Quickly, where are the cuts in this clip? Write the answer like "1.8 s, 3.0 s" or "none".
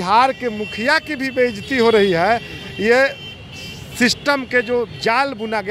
none